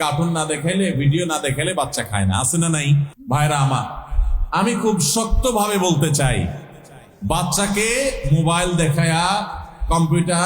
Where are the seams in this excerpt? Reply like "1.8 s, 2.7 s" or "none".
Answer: 3.2 s